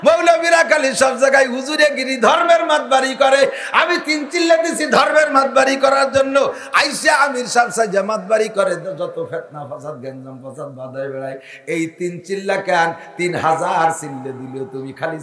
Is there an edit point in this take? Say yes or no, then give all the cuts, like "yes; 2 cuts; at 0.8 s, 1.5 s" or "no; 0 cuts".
no; 0 cuts